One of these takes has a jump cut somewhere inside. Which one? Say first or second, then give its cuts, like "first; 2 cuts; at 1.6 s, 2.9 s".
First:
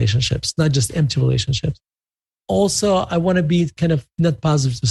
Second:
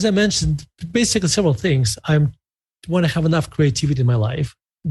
first; 1 cut; at 2.3 s